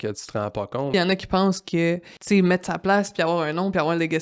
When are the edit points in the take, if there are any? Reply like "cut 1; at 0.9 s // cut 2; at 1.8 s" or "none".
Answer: cut 1; at 0.9 s